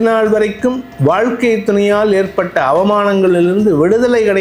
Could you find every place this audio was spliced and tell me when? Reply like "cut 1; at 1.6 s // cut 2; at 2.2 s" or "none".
none